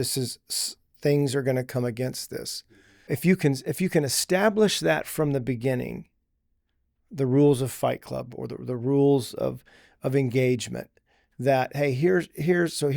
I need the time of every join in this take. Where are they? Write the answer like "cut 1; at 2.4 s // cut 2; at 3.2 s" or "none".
cut 1; at 3.1 s